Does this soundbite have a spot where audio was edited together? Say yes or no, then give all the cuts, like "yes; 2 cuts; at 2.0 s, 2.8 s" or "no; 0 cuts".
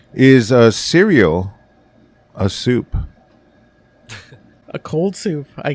yes; 1 cut; at 4.6 s